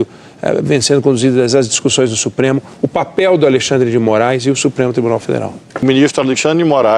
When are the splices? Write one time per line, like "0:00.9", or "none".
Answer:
0:05.8